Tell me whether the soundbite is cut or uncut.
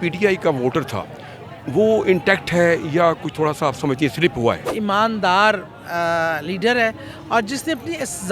cut